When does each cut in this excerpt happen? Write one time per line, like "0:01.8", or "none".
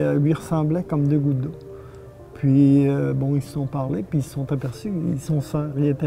none

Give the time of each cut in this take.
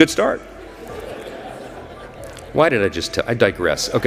none

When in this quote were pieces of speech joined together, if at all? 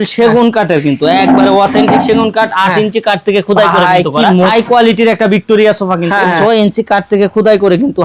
0:04.5
0:06.4

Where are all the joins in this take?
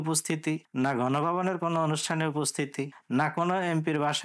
none

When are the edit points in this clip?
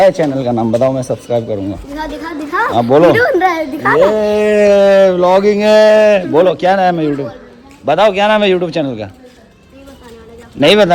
none

